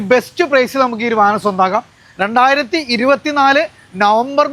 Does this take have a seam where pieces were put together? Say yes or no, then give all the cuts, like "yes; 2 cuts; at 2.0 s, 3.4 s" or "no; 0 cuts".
no; 0 cuts